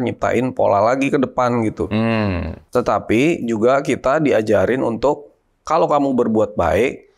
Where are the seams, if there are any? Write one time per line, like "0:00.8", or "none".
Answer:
0:02.5